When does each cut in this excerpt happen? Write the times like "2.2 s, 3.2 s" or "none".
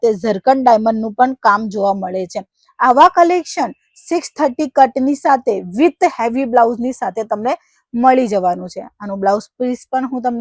none